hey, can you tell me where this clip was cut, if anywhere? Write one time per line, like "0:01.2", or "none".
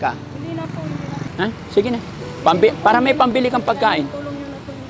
0:01.3